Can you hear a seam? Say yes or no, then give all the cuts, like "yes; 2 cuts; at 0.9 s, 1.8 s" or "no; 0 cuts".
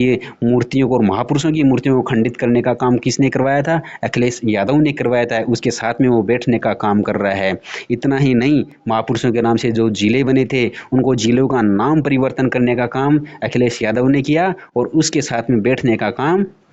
no; 0 cuts